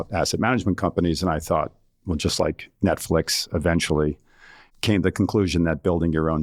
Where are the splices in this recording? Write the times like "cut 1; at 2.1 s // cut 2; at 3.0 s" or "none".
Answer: none